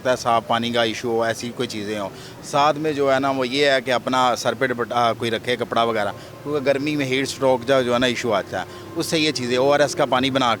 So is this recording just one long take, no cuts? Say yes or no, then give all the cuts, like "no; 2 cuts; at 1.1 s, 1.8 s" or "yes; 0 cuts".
yes; 0 cuts